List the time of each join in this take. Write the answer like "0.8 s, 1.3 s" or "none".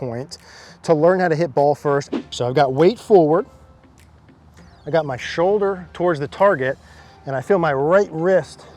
2.2 s